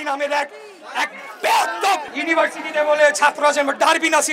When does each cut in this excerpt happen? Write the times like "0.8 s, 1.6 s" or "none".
2.1 s